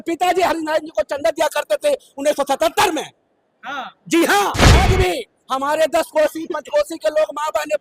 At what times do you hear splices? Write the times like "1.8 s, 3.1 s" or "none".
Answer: 4.8 s

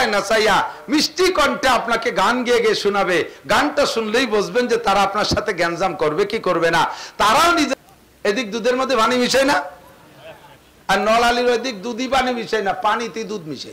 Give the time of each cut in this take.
7.7 s

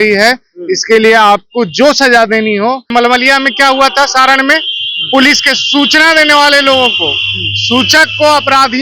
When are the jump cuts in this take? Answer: 2.9 s

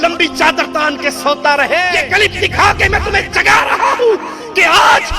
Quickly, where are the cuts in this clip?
2.0 s

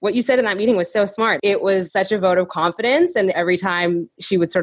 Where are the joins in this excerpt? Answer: 1.7 s, 3.4 s

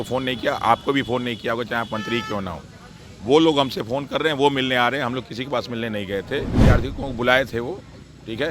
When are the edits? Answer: 6.5 s

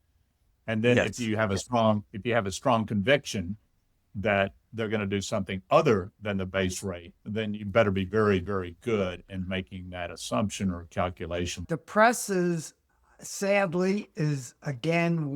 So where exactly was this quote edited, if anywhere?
11.6 s

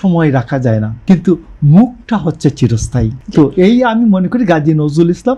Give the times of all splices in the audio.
0.9 s, 3.2 s

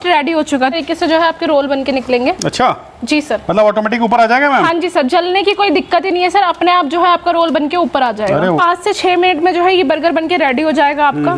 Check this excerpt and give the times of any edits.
0.7 s, 8.6 s

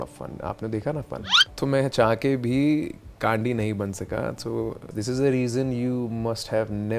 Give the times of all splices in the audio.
1.4 s, 4.9 s

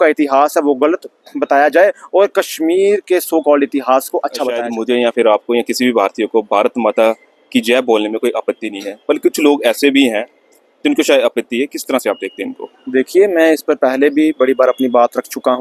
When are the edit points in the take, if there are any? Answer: 4.7 s

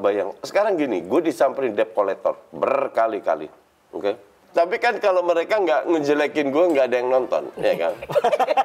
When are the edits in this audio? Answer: 4.3 s

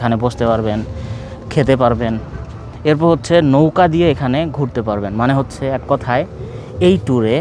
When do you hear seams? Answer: none

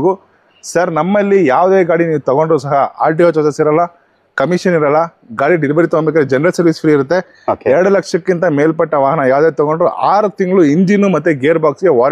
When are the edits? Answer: none

